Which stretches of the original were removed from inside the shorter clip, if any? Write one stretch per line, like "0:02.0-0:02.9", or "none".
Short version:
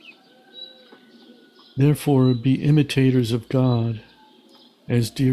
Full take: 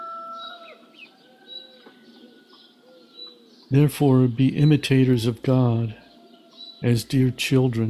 0:02.6-0:03.6